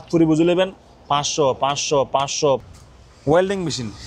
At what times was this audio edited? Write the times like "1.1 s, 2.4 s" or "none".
2.6 s